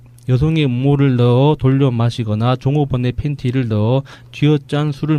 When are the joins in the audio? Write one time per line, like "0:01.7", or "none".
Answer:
0:01.9